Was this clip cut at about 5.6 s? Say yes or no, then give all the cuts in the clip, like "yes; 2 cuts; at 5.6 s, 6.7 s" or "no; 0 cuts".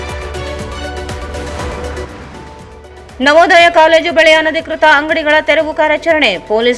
no; 1 cut; at 1.8 s